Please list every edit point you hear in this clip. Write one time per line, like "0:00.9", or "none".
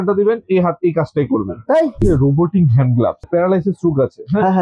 0:02.0
0:03.3